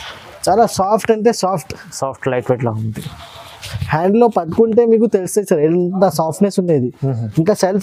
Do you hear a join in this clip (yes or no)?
no